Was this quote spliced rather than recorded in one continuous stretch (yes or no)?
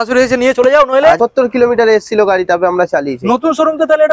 yes